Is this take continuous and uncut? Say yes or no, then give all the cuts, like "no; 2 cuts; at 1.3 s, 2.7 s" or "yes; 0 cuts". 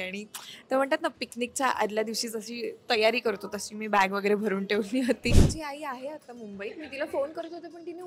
no; 1 cut; at 5.5 s